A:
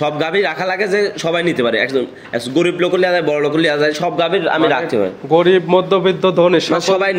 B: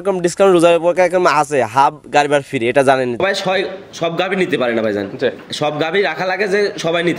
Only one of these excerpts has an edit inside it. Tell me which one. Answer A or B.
B